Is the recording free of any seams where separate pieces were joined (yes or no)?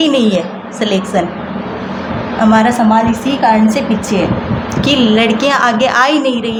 yes